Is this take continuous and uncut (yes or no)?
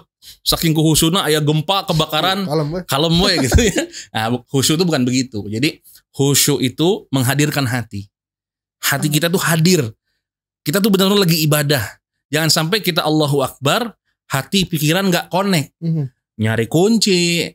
yes